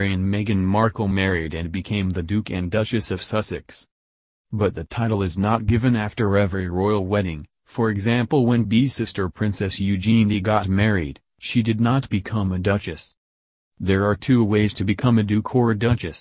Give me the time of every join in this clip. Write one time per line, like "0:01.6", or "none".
0:08.7